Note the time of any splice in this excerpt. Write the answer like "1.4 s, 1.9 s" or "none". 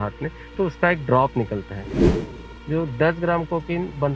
2.1 s